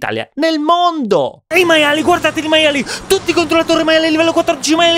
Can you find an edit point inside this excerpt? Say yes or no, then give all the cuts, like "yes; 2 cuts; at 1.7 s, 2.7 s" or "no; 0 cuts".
yes; 1 cut; at 1.4 s